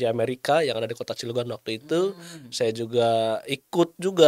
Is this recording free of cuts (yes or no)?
yes